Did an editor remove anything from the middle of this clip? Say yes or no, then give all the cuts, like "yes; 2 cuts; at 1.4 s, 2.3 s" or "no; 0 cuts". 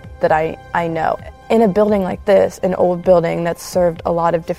yes; 1 cut; at 1.3 s